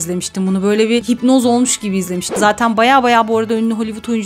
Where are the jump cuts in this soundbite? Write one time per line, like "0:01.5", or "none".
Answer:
0:02.3